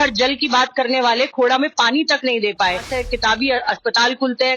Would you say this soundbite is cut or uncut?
cut